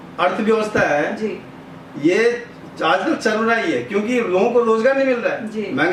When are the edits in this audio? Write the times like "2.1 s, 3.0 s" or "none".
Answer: none